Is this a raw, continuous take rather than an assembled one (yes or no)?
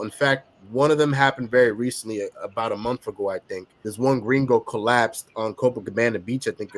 no